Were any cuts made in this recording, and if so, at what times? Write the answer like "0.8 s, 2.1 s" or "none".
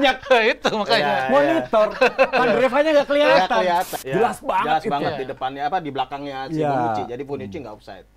3.9 s